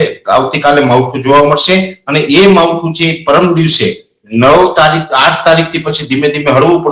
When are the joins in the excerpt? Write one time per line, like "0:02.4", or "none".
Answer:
none